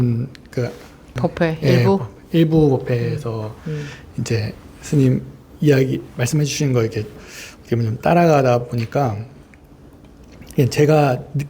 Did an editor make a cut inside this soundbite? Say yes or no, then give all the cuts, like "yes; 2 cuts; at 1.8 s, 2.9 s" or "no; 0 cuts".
yes; 1 cut; at 1.1 s